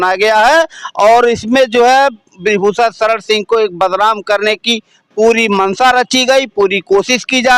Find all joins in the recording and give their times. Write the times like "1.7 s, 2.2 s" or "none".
none